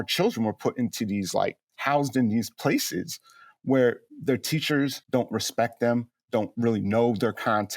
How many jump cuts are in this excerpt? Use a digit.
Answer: 1